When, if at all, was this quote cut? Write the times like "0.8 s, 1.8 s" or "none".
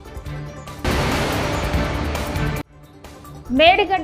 0.8 s, 2.8 s